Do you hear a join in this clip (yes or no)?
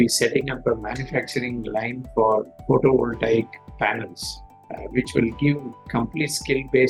no